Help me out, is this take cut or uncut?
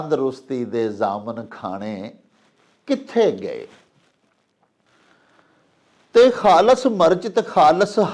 uncut